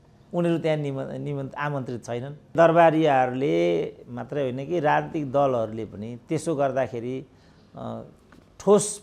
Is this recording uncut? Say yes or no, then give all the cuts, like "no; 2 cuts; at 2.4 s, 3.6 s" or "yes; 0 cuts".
no; 1 cut; at 2.5 s